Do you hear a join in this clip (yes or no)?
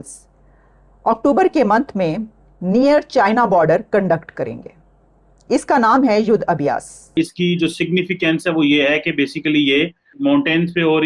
yes